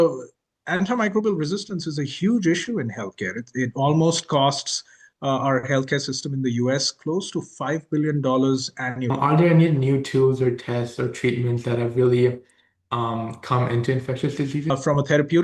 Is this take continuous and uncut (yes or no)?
no